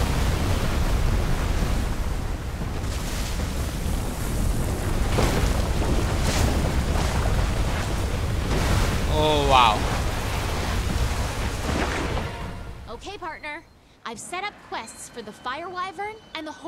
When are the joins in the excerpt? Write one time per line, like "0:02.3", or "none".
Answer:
0:12.8